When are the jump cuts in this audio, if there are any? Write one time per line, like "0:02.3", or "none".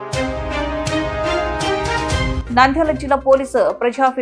none